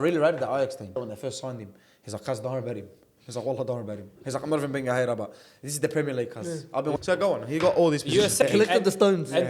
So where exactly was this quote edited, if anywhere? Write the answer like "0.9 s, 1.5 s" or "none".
1.0 s, 7.0 s, 8.4 s